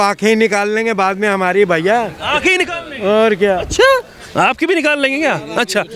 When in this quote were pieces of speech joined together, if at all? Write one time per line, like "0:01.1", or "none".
none